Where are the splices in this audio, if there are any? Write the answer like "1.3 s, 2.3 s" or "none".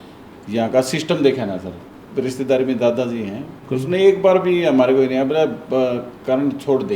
3.6 s